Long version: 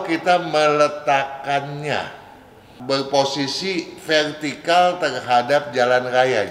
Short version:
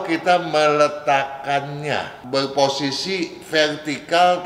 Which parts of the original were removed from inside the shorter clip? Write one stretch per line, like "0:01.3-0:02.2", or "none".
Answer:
0:02.1-0:02.7